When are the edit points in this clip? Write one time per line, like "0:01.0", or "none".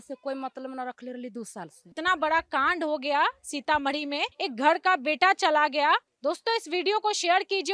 0:01.9
0:04.3
0:06.1